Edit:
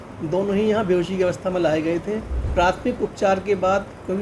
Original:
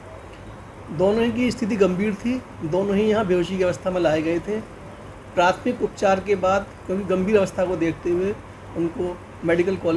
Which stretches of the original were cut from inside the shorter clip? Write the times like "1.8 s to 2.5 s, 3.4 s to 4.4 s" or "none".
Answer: 4.8 s to 5.2 s